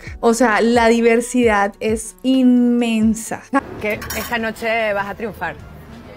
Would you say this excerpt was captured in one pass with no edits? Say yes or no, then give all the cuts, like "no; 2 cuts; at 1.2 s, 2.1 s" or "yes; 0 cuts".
no; 1 cut; at 3.6 s